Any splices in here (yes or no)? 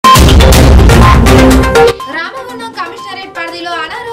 yes